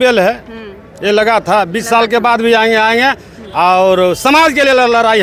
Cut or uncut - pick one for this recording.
uncut